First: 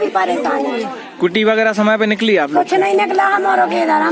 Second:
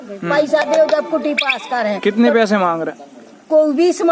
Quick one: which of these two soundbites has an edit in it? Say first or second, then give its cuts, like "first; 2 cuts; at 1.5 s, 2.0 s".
first; 1 cut; at 1.0 s